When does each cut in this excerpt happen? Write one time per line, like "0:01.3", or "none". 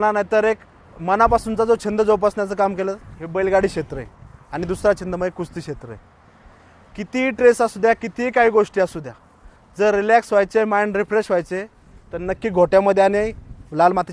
none